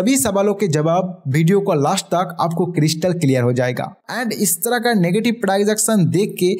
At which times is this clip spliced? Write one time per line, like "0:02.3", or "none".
0:04.1